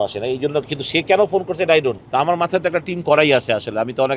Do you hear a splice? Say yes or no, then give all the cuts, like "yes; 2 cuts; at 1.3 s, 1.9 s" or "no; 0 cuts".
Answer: yes; 1 cut; at 2.0 s